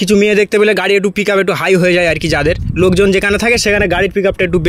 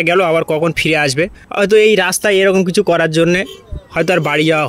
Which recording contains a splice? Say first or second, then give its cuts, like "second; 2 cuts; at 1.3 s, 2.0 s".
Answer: second; 1 cut; at 1.4 s